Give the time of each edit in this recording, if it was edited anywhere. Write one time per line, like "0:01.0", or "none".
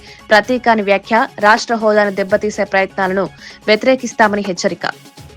none

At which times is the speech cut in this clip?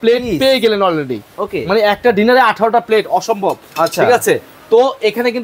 none

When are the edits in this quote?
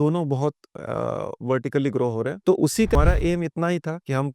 0:03.0

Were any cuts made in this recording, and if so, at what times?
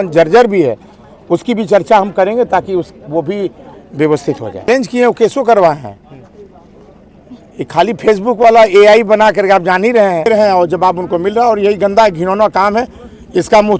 0:04.7
0:10.3

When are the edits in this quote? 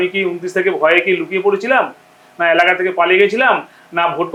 none

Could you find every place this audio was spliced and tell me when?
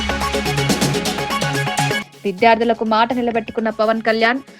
0:02.0

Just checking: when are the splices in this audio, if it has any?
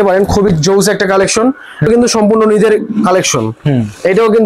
0:01.9

